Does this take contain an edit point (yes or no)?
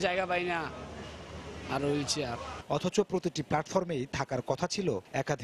no